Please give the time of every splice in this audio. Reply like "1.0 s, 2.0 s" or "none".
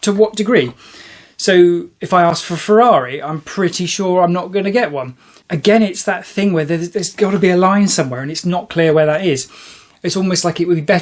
5.4 s